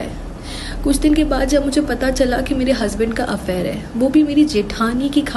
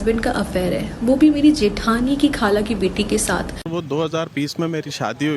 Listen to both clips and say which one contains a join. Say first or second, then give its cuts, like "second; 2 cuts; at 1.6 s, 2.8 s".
second; 1 cut; at 3.6 s